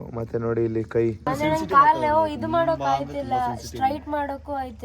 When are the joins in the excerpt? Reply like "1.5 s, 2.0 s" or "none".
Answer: 1.3 s